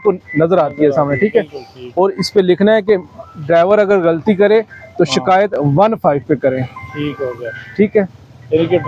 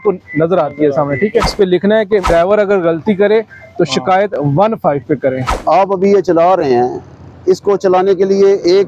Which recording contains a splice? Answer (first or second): second